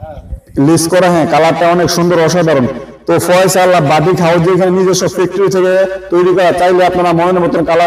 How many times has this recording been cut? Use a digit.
0